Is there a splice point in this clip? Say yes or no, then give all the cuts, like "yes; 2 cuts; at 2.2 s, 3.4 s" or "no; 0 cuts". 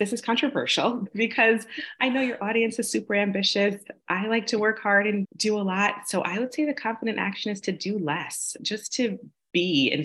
yes; 3 cuts; at 1.0 s, 5.3 s, 8.6 s